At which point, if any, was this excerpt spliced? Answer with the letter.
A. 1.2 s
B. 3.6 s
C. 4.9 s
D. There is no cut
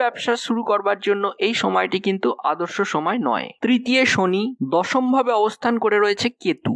B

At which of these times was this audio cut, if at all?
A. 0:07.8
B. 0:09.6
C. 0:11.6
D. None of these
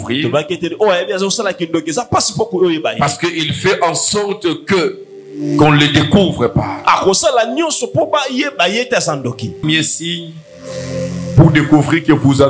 B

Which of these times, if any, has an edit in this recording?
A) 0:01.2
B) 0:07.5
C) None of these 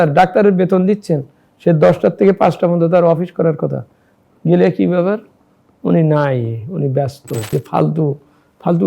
B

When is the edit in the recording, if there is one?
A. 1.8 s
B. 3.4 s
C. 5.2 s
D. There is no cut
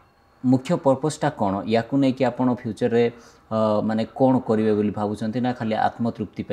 D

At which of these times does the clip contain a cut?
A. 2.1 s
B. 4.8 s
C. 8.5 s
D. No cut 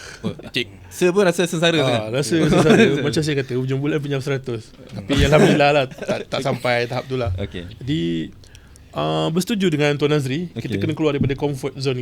D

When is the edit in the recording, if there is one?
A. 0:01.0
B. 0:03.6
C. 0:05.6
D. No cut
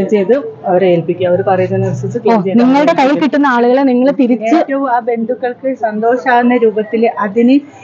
D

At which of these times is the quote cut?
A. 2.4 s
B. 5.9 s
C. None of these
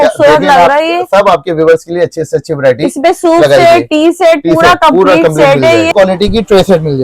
B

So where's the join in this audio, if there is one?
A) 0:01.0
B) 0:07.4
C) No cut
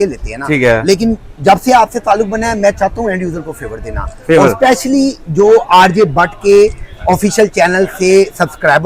C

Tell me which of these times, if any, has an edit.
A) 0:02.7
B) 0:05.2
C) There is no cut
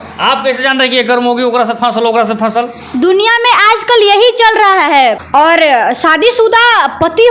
B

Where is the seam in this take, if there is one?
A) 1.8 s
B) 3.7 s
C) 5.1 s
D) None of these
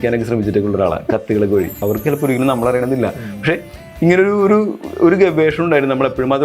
A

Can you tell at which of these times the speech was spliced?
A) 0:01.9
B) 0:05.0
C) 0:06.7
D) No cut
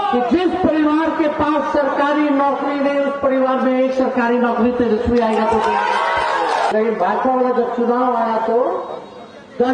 C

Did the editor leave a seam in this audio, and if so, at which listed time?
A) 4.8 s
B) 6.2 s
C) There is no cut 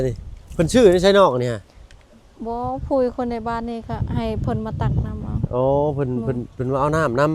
C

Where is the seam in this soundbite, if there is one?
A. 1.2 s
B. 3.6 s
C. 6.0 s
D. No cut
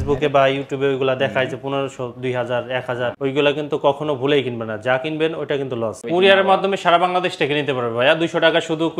C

